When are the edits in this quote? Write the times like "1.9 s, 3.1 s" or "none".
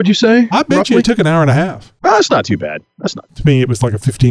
1.8 s, 3.3 s

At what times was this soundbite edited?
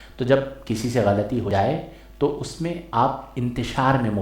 1.5 s

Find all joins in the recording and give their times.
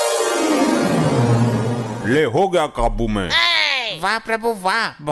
none

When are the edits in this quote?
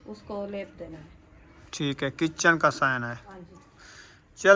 none

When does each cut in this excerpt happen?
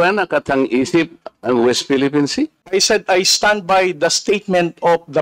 2.6 s

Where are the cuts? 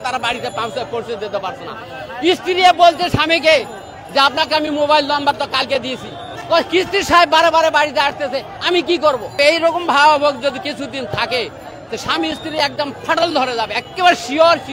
6.4 s, 9.3 s

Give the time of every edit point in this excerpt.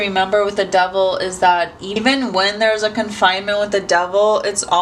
none

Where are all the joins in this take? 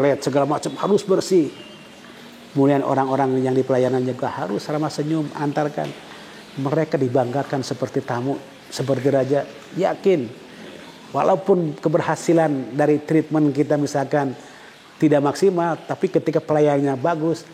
none

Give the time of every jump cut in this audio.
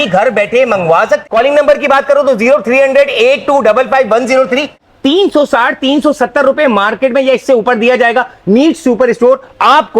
1.2 s, 4.8 s

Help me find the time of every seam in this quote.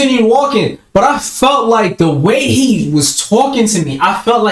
none

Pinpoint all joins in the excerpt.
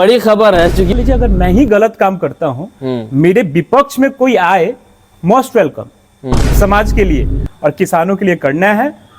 1.0 s, 6.4 s

